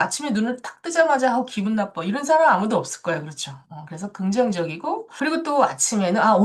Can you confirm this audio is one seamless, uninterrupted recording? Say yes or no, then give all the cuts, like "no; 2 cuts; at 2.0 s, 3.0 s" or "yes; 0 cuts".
yes; 0 cuts